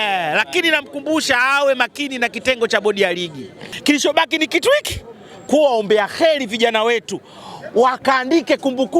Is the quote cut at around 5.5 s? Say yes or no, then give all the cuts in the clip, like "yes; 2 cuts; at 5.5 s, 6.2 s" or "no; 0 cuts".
no; 1 cut; at 3.6 s